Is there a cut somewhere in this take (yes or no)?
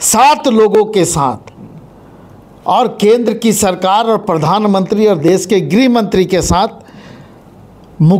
no